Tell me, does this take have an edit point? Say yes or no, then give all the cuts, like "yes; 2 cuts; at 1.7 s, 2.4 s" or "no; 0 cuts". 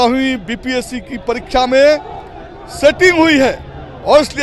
no; 0 cuts